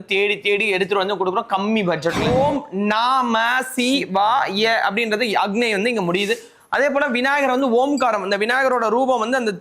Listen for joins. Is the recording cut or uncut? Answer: cut